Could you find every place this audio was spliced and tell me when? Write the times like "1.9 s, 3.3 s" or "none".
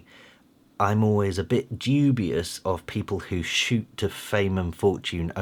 none

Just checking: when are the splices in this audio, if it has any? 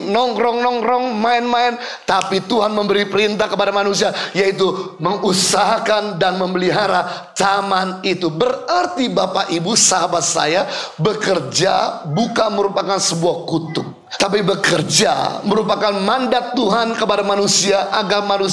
14.0 s

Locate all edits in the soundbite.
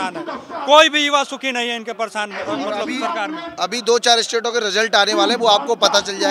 none

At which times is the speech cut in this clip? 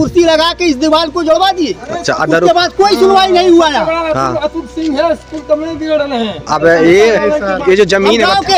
none

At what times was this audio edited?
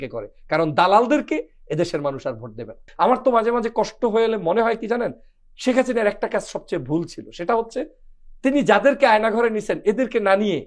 2.8 s

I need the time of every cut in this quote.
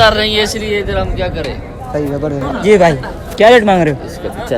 2.5 s

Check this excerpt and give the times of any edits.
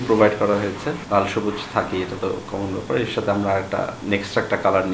1.0 s, 4.0 s

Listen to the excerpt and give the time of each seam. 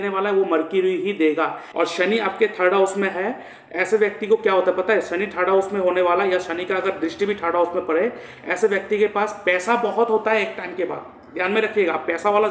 1.6 s

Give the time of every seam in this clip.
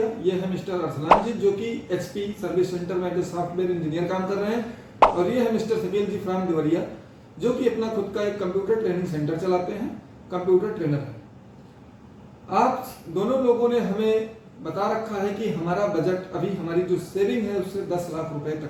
none

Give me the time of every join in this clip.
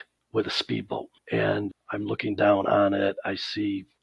1.7 s

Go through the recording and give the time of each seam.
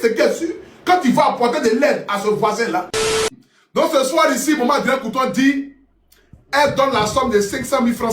3.3 s

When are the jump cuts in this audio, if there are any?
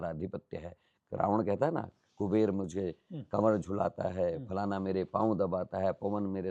none

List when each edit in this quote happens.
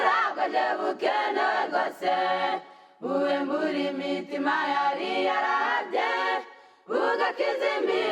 2.4 s

